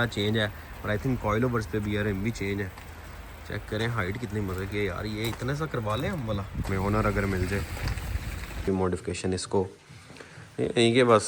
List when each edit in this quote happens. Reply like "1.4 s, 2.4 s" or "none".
6.7 s, 8.7 s